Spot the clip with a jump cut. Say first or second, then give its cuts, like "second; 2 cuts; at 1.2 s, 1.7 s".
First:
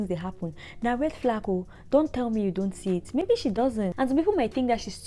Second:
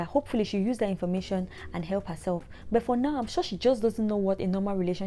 first; 1 cut; at 3.9 s